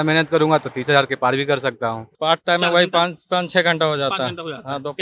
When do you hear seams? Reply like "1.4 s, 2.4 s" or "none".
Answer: 2.0 s

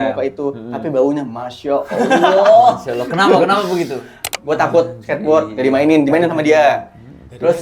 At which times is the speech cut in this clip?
4.4 s

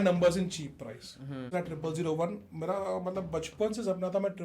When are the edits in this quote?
1.5 s

